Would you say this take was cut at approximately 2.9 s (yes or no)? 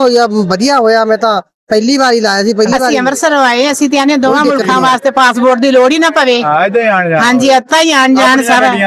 yes